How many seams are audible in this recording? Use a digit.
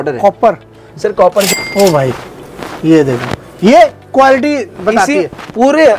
1